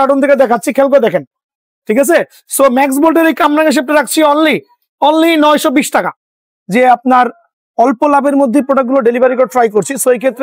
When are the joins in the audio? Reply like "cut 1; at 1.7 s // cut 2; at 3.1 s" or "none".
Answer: cut 1; at 6.3 s